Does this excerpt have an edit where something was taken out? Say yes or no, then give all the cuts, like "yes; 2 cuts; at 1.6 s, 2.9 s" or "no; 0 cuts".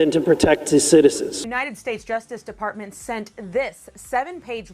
yes; 1 cut; at 1.4 s